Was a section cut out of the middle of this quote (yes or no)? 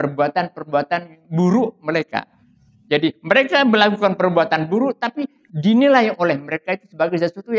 no